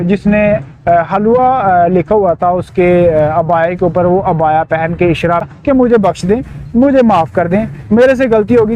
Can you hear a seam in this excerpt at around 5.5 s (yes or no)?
yes